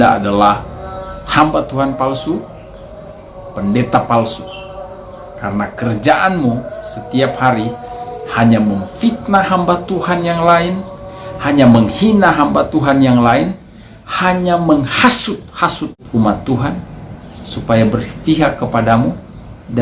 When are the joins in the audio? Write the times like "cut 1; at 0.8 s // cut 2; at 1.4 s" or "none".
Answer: cut 1; at 16.0 s

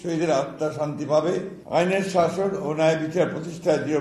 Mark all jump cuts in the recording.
cut 1; at 1.6 s

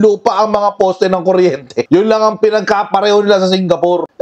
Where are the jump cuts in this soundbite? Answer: cut 1; at 1.9 s

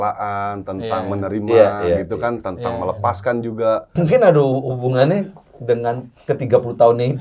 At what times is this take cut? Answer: cut 1; at 3.9 s

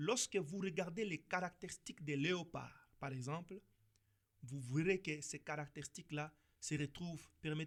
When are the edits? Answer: none

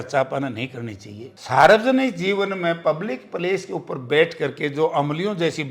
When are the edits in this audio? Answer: none

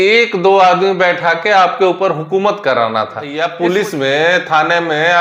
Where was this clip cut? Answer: cut 1; at 3.3 s

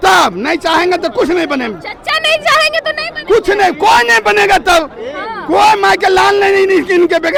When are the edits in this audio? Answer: none

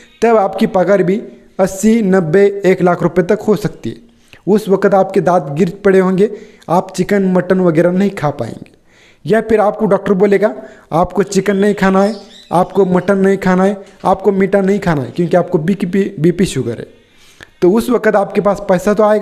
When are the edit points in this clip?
none

